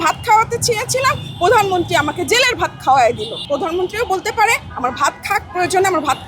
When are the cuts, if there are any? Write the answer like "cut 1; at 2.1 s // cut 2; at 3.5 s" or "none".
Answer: cut 1; at 3.4 s